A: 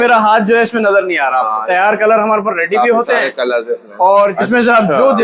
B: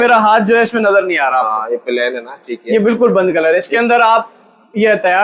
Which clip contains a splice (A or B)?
A